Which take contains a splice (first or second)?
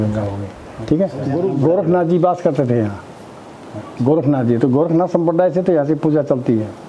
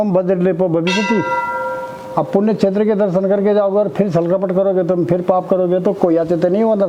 first